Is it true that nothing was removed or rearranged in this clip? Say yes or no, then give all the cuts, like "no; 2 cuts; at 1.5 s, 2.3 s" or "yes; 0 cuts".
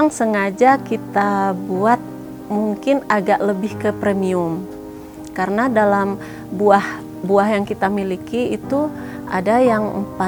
yes; 0 cuts